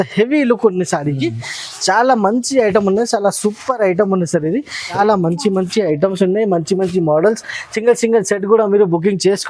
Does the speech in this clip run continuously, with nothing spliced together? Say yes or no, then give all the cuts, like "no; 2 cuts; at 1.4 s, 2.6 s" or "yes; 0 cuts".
no; 1 cut; at 5.0 s